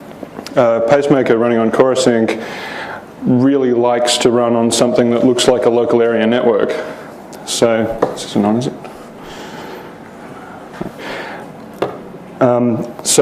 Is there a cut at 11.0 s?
yes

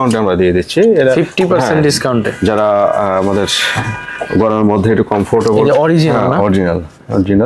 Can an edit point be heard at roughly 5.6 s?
no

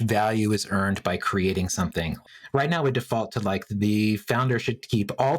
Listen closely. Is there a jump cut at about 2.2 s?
yes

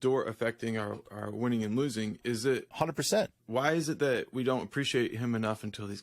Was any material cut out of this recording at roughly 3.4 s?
yes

